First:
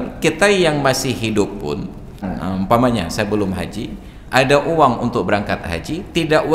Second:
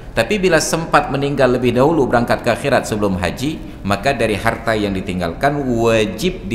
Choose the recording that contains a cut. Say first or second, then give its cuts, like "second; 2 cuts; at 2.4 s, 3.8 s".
first; 1 cut; at 2.3 s